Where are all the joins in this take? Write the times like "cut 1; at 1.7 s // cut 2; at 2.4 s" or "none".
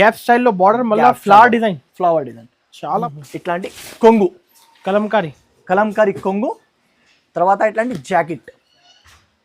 cut 1; at 3.0 s